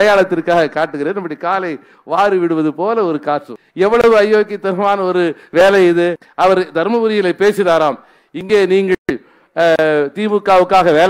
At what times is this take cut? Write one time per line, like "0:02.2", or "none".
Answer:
0:03.6
0:06.2